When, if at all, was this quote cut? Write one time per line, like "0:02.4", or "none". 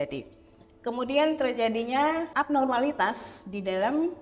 0:02.3